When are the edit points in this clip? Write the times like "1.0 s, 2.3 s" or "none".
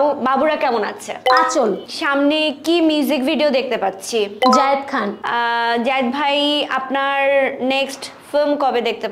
none